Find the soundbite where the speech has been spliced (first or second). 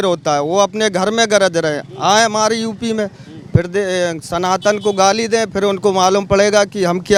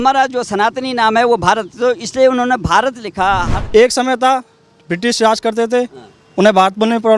second